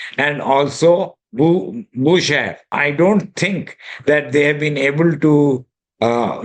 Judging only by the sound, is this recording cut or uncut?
cut